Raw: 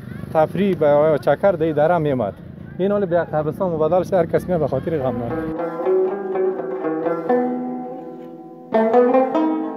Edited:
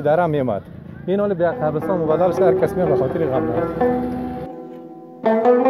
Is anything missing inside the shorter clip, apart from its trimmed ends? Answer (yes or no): yes